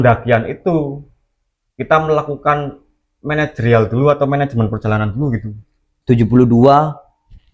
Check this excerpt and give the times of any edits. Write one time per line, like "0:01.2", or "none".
0:05.8